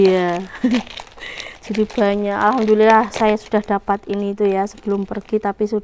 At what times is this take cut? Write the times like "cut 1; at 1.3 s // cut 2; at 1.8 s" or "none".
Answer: none